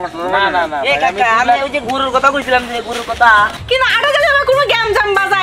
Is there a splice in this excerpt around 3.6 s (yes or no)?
yes